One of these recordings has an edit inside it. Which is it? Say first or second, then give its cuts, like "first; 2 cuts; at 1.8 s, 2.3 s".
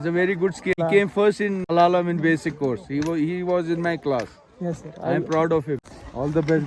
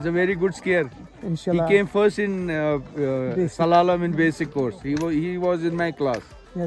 first; 3 cuts; at 0.8 s, 1.7 s, 5.9 s